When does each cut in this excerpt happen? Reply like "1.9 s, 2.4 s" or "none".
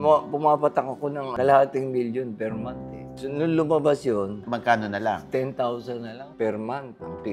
1.2 s, 3.1 s, 4.4 s, 6.2 s